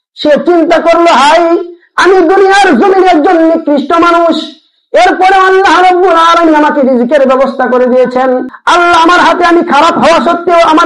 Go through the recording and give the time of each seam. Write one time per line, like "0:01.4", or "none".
0:08.5